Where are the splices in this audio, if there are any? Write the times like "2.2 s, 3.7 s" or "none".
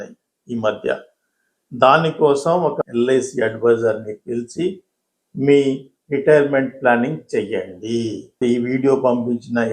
none